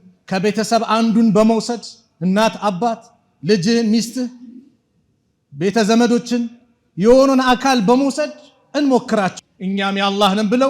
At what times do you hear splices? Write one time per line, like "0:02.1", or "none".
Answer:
0:09.3